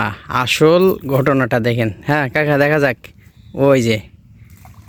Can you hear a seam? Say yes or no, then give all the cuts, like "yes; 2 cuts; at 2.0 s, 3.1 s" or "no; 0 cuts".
no; 0 cuts